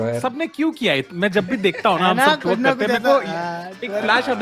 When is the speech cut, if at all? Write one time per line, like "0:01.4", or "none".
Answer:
none